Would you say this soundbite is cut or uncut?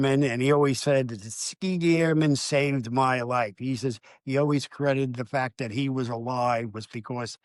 uncut